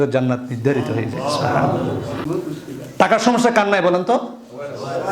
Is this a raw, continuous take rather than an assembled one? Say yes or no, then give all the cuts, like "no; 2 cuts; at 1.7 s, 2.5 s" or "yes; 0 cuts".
no; 1 cut; at 2.2 s